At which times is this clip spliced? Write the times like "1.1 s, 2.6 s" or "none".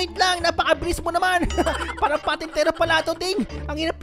none